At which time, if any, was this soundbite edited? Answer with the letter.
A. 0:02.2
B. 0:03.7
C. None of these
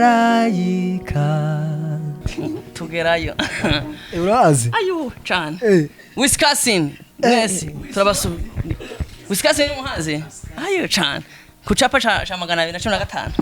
A